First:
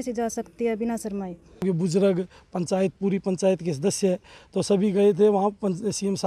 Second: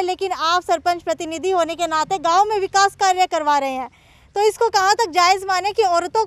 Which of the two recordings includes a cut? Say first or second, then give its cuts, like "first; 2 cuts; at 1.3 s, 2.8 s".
first; 1 cut; at 1.6 s